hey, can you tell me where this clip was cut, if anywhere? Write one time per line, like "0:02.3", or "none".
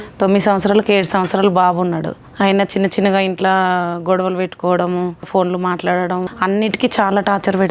0:02.2
0:05.3
0:06.3